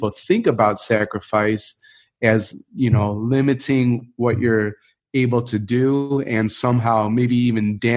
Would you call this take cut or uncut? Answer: uncut